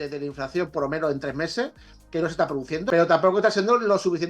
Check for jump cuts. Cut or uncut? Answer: cut